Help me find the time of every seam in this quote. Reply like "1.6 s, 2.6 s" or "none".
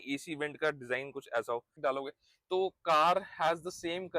1.8 s